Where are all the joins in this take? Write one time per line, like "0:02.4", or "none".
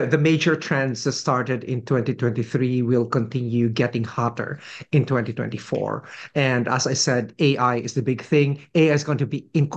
none